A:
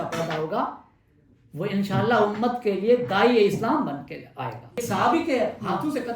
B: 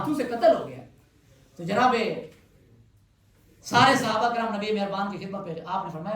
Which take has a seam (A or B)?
A